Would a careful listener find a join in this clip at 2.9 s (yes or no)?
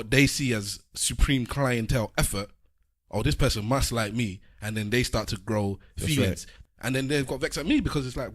no